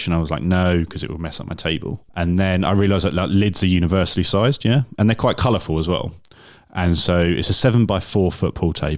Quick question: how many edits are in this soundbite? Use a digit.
1